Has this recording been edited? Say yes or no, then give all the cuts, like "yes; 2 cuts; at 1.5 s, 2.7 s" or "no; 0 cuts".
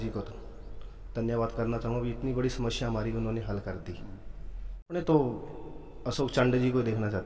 yes; 1 cut; at 4.9 s